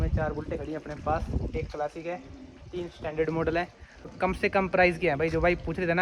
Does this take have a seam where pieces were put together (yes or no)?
yes